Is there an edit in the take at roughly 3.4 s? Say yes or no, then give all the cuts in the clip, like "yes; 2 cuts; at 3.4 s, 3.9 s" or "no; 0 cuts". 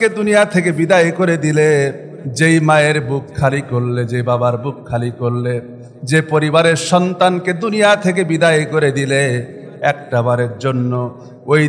no; 0 cuts